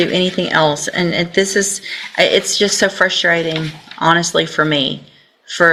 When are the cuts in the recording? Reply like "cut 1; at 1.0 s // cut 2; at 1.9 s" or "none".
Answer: none